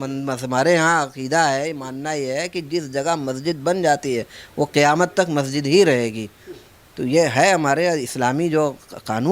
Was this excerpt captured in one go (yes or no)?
yes